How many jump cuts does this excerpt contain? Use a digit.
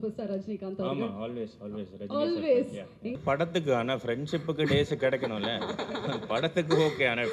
1